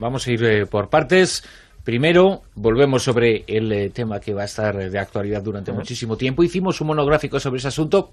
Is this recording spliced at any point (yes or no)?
yes